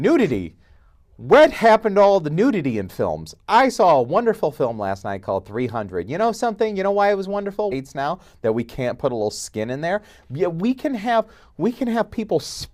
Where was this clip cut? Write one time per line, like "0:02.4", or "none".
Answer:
none